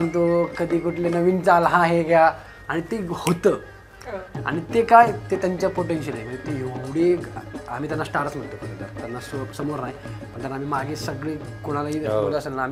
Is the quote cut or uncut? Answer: uncut